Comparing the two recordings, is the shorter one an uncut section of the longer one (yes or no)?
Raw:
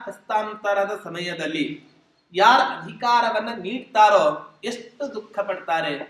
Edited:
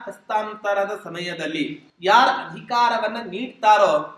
no